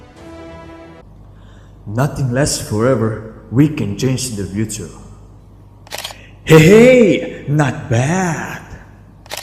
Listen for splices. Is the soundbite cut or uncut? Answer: cut